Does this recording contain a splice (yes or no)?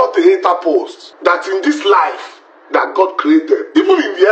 yes